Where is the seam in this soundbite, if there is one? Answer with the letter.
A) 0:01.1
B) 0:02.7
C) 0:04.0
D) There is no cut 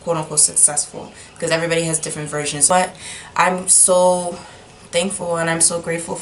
B